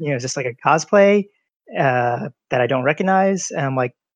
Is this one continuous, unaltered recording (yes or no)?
yes